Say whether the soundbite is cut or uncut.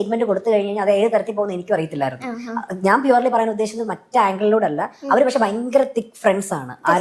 uncut